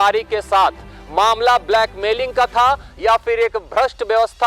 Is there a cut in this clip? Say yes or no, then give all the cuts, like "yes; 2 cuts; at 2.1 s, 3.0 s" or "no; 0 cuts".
no; 0 cuts